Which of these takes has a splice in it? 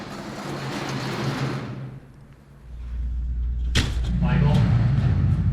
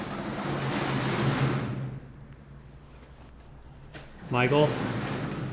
first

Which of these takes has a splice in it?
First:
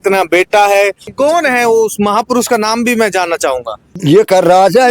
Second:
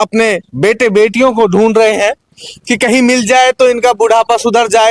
first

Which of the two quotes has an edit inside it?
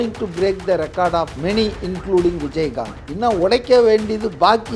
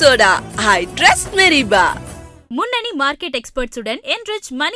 first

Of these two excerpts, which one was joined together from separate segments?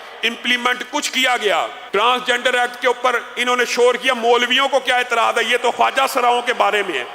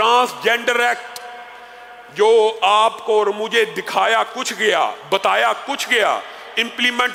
first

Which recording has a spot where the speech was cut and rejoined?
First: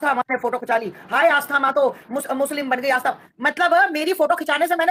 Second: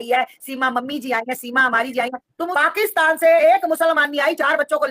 second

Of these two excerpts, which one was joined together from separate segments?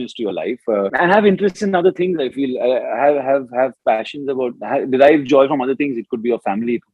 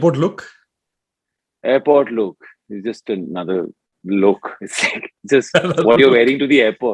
first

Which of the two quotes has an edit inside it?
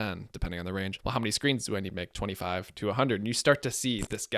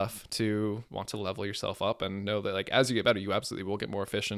first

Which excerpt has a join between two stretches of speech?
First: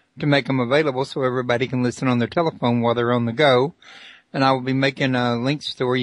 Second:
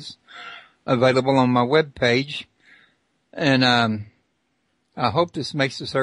second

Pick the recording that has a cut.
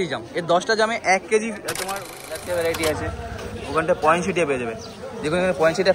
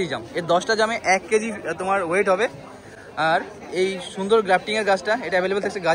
first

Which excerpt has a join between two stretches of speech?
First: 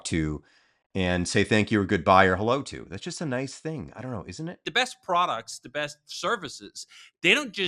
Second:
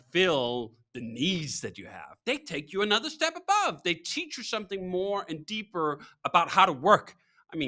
first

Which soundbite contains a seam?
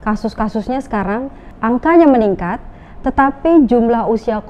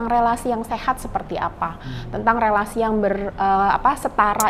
first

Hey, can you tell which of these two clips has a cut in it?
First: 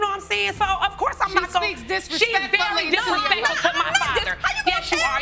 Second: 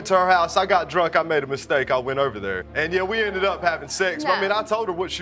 second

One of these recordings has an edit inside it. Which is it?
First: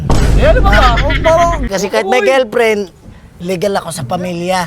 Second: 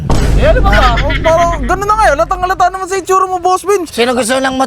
first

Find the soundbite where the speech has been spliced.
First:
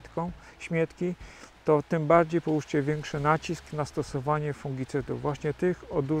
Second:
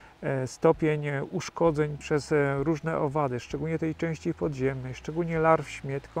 second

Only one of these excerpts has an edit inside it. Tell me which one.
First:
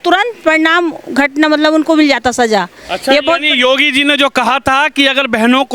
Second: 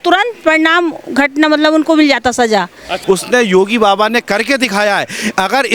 second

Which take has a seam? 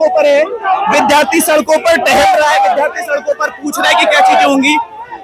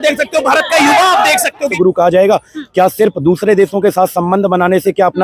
second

